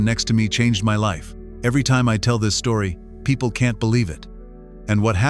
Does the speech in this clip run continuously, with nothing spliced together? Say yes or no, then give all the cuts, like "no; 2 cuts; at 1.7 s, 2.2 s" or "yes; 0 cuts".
yes; 0 cuts